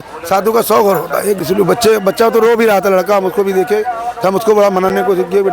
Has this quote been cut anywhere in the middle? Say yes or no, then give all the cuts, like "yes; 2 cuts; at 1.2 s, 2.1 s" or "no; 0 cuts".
yes; 1 cut; at 1.4 s